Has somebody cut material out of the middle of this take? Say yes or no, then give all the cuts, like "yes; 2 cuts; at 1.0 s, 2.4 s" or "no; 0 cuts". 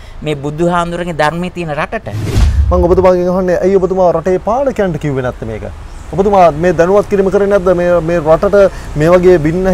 yes; 1 cut; at 2.5 s